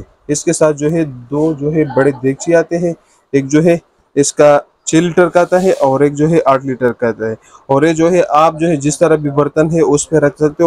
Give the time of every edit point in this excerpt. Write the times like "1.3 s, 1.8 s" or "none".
none

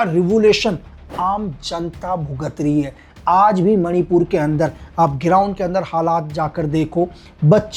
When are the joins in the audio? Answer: none

